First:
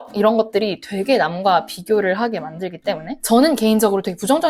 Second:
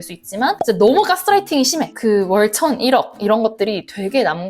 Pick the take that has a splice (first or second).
second